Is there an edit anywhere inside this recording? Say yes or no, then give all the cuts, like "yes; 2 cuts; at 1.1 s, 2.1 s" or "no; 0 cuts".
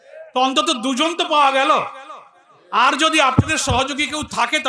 no; 0 cuts